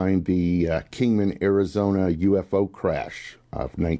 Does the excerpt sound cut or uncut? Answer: cut